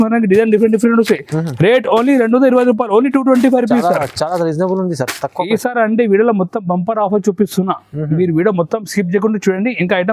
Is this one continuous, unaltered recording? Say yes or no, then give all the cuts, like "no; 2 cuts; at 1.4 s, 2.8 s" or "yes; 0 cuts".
yes; 0 cuts